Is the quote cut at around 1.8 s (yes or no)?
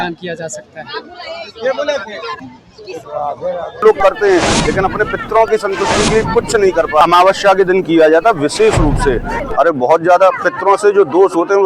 no